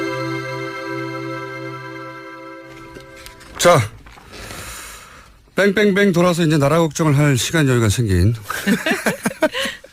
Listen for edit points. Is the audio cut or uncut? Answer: uncut